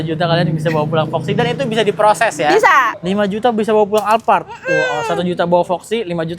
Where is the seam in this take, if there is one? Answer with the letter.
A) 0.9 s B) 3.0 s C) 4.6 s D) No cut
B